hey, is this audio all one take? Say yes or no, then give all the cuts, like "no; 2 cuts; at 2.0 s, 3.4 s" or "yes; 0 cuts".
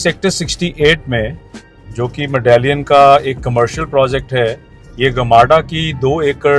yes; 0 cuts